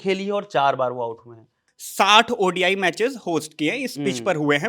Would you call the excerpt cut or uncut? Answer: cut